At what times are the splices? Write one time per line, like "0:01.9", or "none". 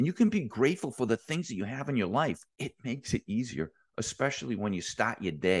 0:02.5